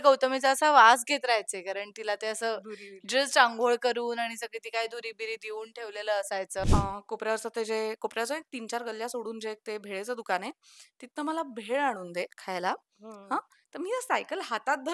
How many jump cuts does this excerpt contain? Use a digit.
1